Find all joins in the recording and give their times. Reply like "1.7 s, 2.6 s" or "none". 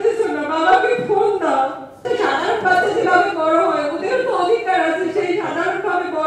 2.0 s